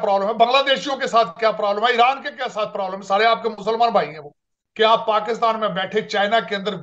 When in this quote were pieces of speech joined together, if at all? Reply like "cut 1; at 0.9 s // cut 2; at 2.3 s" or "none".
cut 1; at 4.6 s